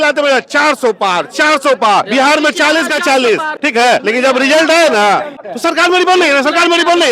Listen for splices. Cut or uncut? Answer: cut